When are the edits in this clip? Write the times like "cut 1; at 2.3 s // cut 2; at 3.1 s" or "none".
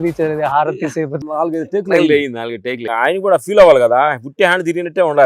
cut 1; at 1.1 s // cut 2; at 2.8 s